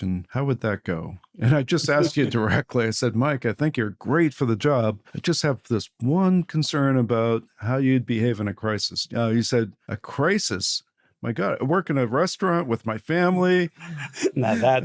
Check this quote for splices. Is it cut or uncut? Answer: uncut